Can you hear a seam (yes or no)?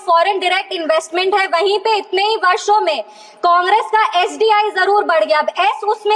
no